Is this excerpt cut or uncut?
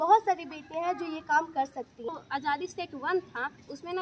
cut